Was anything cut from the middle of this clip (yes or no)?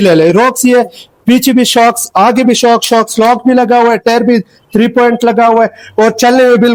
no